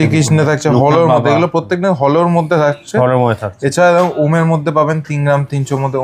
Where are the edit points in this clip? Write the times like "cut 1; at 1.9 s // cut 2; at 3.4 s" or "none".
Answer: none

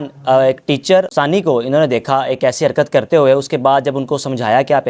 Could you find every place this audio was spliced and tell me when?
cut 1; at 1.1 s

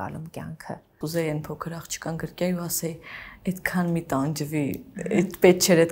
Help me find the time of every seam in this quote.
cut 1; at 0.9 s

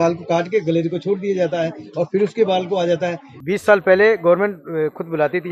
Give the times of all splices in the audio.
cut 1; at 3.3 s

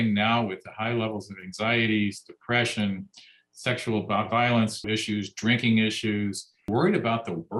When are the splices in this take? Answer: cut 1; at 4.9 s // cut 2; at 6.7 s

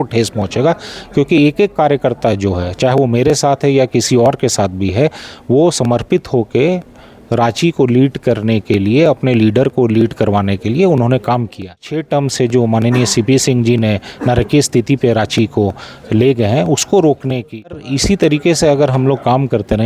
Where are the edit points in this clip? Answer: cut 1; at 12.0 s // cut 2; at 17.9 s

